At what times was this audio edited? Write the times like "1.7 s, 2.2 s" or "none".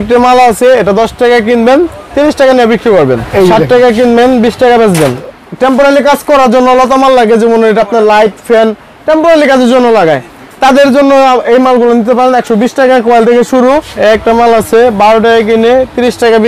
3.3 s, 5.3 s, 13.9 s